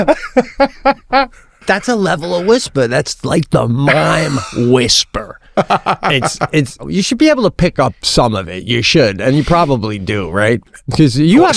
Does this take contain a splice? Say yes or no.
yes